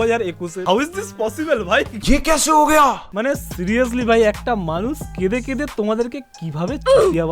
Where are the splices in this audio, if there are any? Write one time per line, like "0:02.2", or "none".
0:03.1